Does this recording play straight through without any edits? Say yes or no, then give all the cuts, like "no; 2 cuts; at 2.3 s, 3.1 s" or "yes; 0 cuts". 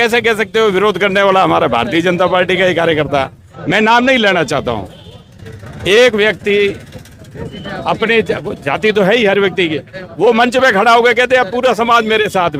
yes; 0 cuts